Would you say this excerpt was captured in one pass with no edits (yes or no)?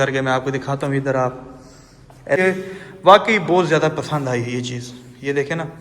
no